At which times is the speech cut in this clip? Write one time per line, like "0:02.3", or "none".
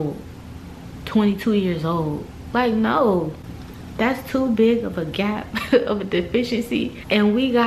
none